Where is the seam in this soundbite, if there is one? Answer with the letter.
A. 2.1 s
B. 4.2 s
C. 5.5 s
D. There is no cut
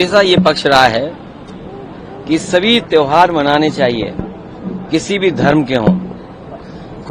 D